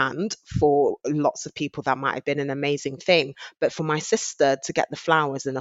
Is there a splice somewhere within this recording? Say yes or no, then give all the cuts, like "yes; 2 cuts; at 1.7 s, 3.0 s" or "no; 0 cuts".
no; 0 cuts